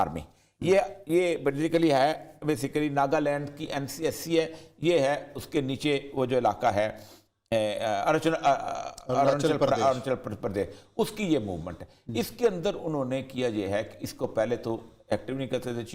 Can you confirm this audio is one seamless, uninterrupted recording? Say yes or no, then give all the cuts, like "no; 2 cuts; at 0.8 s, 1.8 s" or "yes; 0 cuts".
yes; 0 cuts